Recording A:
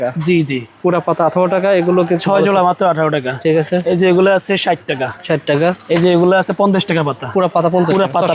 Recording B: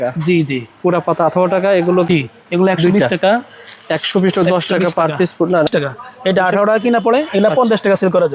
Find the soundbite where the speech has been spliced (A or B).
B